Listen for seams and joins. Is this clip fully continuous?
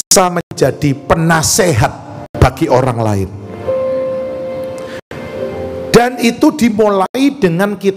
yes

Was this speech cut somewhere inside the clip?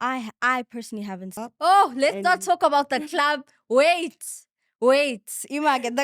yes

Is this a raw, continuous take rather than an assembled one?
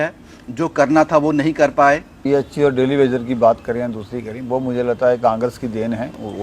no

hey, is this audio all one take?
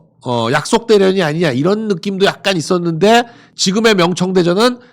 no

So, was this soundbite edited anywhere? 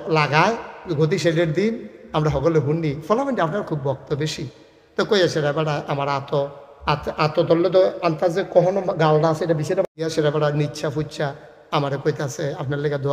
yes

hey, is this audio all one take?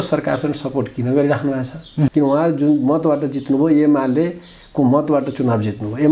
no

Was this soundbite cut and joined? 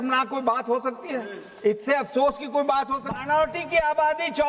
yes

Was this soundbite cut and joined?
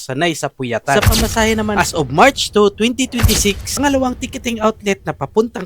yes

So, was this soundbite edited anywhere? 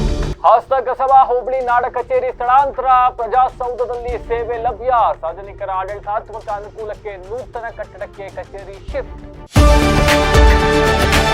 yes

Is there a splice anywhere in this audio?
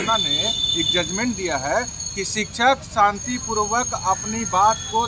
no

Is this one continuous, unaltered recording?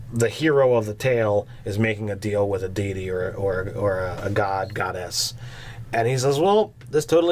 no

